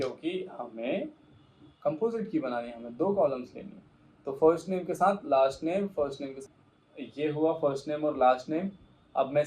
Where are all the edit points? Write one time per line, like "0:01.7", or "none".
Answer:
0:06.3